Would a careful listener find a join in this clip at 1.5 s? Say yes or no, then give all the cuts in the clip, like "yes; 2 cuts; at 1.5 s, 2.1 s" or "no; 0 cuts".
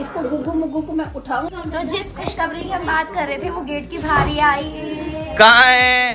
yes; 1 cut; at 1.5 s